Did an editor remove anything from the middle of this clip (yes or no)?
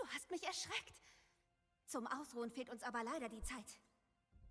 no